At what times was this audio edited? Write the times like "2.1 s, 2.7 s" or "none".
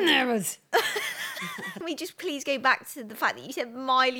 1.8 s